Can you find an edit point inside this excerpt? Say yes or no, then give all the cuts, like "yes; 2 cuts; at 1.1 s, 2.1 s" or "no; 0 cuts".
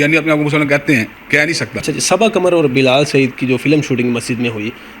yes; 1 cut; at 1.8 s